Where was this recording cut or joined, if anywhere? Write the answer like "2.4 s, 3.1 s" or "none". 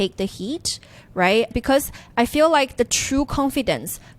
1.5 s